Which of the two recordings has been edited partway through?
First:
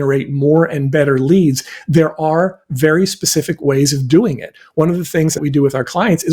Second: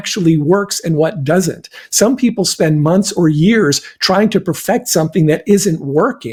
first; 1 cut; at 5.4 s

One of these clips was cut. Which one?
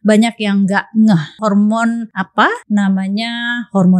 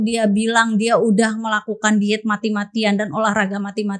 first; 2 cuts; at 1.3 s, 2.3 s

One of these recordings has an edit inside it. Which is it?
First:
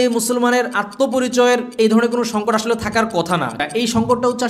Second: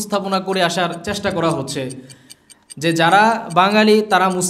first; 1 cut; at 3.6 s

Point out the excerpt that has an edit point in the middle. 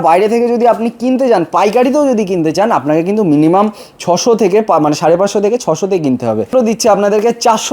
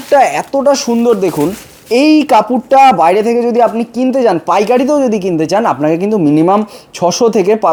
first; 1 cut; at 6.5 s

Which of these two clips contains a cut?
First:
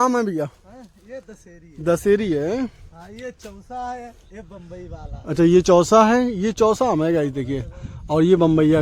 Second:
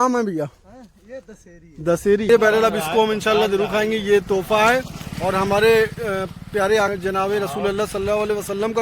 second; 1 cut; at 2.3 s

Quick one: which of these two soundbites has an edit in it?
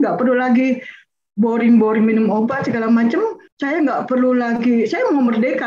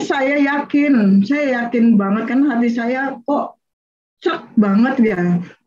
first; 1 cut; at 3.5 s

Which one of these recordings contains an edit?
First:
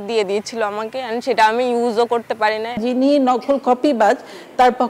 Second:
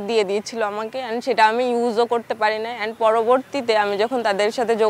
first; 1 cut; at 2.8 s

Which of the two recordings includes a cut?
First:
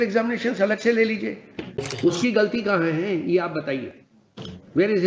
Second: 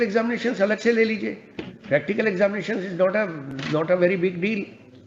first; 1 cut; at 1.8 s

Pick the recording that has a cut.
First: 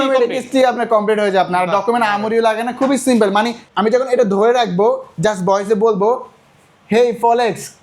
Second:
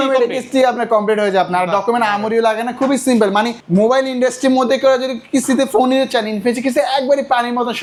first; 1 cut; at 3.6 s

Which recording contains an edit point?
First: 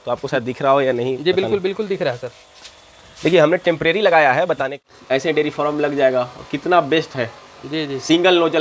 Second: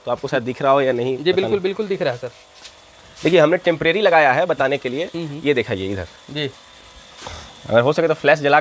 first; 1 cut; at 4.8 s

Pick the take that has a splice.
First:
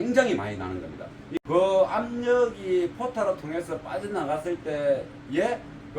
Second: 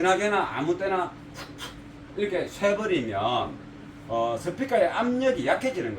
first; 1 cut; at 1.4 s

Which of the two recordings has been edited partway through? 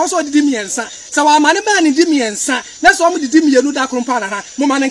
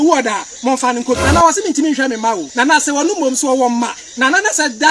second; 2 cuts; at 1.2 s, 2.5 s

